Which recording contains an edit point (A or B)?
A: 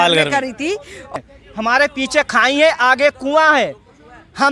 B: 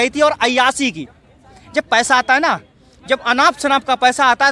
A